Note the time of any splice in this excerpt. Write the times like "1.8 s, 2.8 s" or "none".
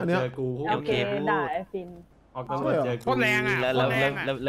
none